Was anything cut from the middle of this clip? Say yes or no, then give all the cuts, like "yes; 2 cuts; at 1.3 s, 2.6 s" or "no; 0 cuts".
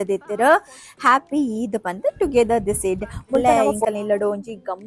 yes; 1 cut; at 3.4 s